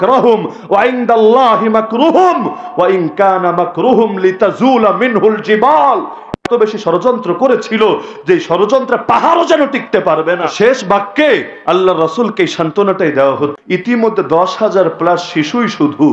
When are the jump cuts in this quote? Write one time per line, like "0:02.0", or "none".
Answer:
0:13.6